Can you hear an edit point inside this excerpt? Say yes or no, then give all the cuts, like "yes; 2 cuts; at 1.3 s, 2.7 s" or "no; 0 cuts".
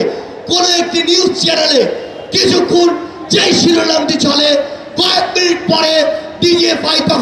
no; 0 cuts